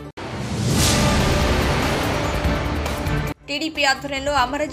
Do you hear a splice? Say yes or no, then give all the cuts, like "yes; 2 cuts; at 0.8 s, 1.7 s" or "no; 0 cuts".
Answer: yes; 1 cut; at 3.2 s